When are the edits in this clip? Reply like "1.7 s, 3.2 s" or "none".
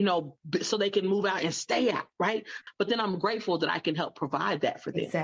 2.6 s